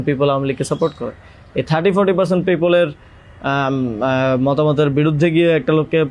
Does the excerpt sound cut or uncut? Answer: uncut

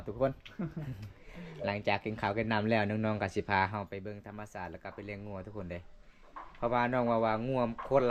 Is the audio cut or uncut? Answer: uncut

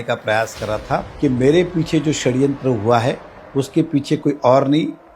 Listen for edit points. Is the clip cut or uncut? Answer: cut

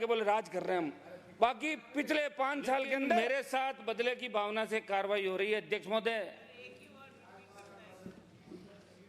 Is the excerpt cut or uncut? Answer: cut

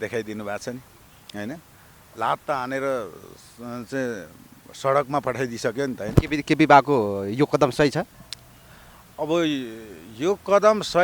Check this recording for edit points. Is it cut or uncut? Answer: uncut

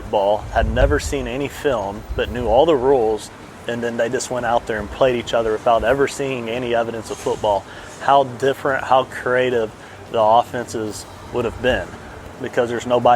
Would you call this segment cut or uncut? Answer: cut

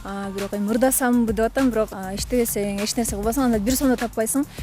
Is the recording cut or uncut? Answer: cut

